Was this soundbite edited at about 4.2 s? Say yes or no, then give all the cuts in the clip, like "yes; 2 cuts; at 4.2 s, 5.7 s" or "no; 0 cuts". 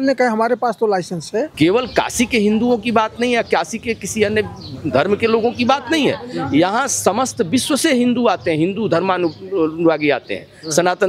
no; 1 cut; at 1.5 s